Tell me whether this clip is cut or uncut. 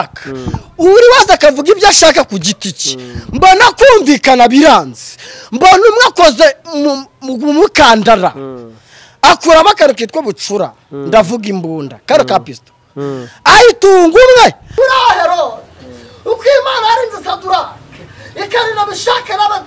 cut